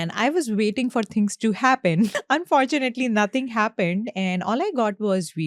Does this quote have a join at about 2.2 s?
yes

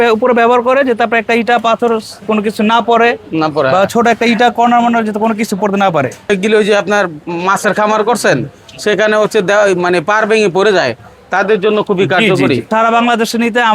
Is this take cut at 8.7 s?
no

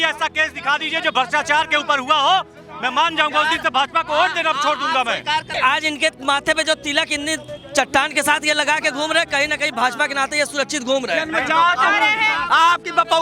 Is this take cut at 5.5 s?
yes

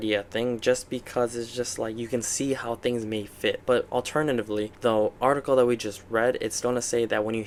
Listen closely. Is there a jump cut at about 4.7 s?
no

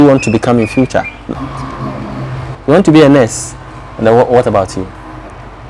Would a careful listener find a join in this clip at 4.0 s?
no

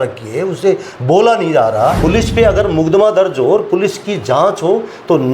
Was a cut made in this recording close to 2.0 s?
yes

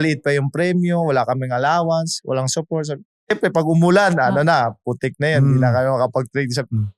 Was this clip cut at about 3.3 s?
yes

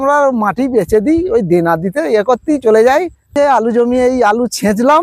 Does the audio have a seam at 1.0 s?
no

